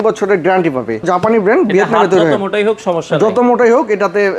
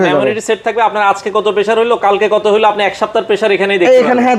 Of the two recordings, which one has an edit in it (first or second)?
first